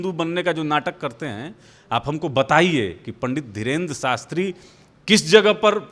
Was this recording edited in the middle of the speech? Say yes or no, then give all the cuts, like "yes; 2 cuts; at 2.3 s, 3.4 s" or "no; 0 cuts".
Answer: no; 0 cuts